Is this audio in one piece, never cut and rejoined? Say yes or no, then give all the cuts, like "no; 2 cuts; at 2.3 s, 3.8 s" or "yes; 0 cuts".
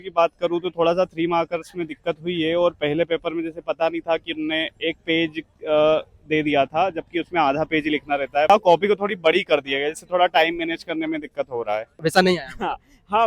no; 2 cuts; at 8.5 s, 12.0 s